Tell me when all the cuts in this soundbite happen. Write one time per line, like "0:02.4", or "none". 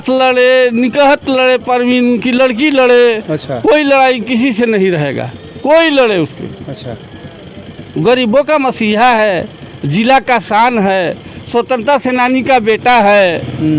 none